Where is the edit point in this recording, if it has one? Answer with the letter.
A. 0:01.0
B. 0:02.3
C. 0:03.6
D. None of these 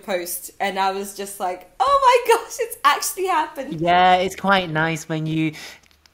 C